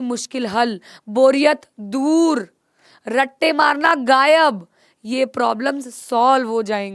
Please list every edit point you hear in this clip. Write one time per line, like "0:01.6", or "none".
none